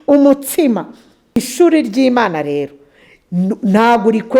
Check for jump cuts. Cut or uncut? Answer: cut